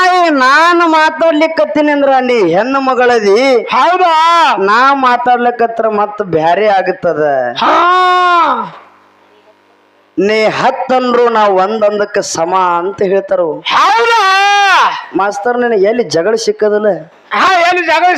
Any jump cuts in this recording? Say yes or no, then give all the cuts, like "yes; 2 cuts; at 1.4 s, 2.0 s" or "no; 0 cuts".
no; 0 cuts